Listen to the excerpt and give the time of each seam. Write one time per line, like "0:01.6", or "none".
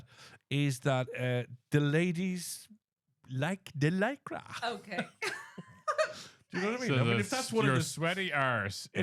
none